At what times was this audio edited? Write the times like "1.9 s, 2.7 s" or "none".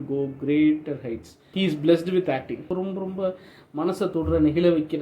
1.4 s, 2.7 s